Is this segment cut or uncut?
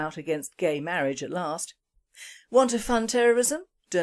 cut